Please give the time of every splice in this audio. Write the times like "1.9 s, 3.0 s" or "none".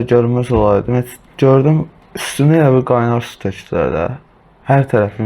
1.2 s, 2.0 s

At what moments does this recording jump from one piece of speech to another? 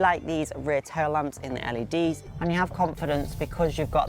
2.3 s

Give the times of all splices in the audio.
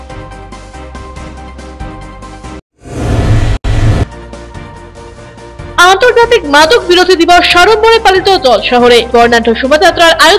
none

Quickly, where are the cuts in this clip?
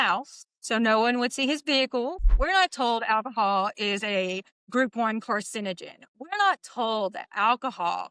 2.2 s

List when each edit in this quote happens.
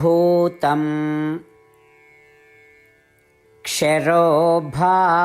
2.0 s, 3.6 s

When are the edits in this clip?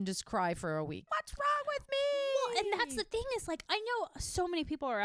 1.1 s, 3.6 s

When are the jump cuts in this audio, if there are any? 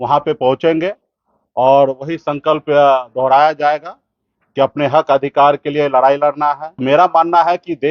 6.7 s

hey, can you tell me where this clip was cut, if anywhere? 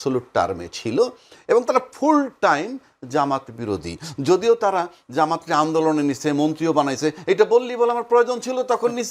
none

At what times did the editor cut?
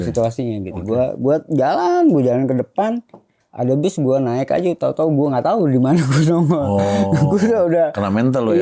none

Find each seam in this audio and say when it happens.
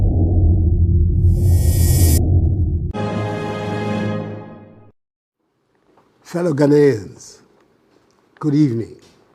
2.9 s

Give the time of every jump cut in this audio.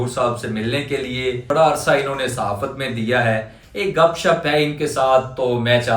1.4 s

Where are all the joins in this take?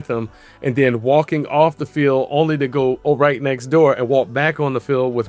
none

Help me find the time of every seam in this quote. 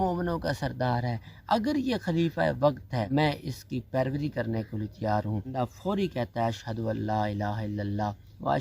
3.1 s, 5.5 s

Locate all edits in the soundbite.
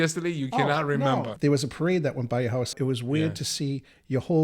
1.3 s, 2.7 s

